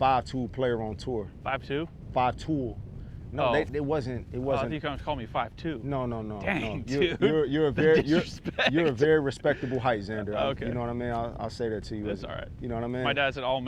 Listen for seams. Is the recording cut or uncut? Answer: cut